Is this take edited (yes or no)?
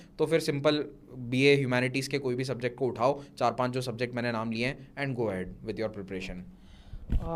no